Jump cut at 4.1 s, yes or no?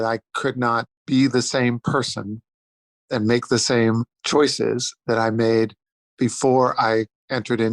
yes